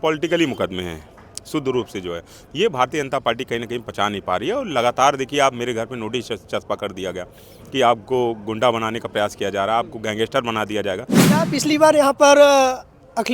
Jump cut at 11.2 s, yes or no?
yes